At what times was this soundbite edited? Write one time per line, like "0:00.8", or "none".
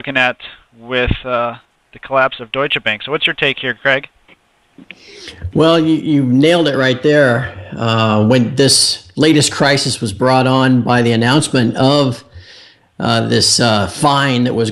none